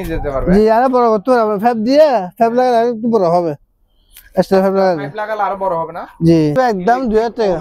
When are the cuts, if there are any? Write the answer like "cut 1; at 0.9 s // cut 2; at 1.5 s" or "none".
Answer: cut 1; at 6.5 s